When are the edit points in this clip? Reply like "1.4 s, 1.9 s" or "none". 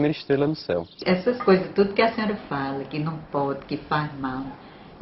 0.9 s